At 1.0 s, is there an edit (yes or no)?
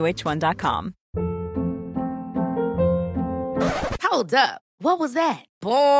yes